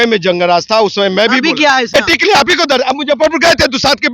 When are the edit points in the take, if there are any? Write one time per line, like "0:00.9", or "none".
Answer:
0:01.9